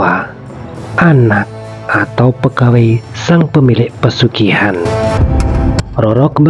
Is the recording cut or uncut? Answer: cut